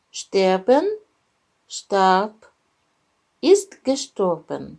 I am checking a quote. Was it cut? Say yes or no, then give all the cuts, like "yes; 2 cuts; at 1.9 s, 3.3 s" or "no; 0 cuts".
no; 0 cuts